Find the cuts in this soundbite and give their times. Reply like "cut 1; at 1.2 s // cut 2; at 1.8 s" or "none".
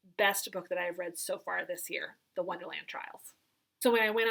none